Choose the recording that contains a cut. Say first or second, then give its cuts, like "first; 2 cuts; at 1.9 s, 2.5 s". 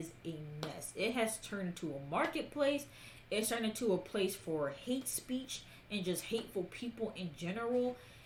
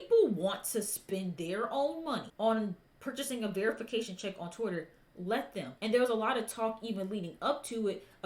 second; 2 cuts; at 2.3 s, 5.7 s